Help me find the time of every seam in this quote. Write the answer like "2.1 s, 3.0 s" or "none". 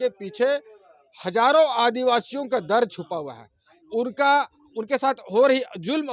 none